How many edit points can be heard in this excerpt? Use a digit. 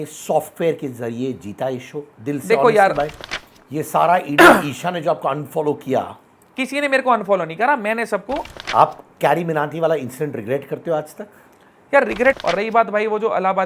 3